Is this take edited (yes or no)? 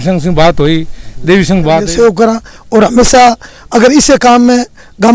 yes